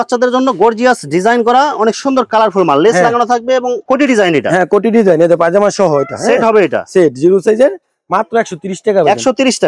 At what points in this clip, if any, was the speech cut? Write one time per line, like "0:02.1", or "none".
none